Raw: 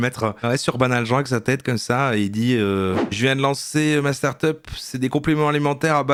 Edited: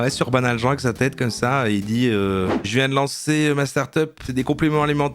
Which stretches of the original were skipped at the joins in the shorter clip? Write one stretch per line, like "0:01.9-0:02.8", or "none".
0:04.7-0:04.9